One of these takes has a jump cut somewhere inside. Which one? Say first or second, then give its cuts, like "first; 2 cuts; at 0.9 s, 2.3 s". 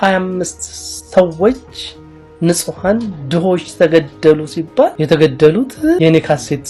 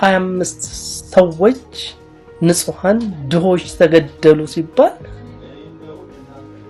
first; 2 cuts; at 5.0 s, 6.0 s